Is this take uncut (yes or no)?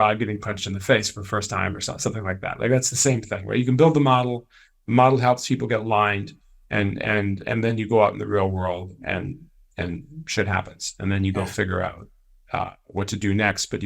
yes